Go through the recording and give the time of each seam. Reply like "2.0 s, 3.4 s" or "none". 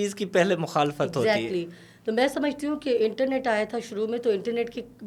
none

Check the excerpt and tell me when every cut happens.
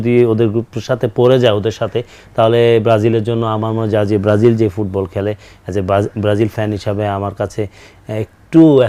none

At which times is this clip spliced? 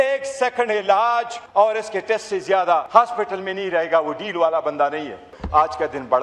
1.4 s, 2.9 s, 5.3 s

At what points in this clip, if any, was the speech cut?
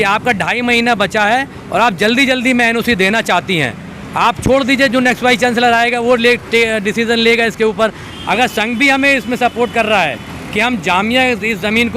8.1 s

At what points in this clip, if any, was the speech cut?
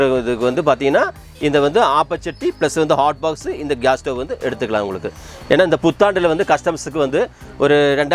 none

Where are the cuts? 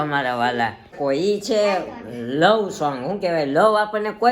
0.9 s

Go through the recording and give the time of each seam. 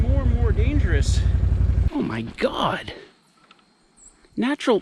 1.8 s

